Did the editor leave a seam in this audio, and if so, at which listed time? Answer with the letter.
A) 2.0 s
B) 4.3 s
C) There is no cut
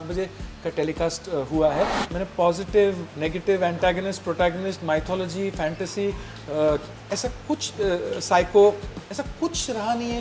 A